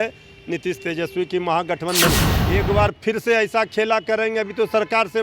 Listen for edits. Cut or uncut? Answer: cut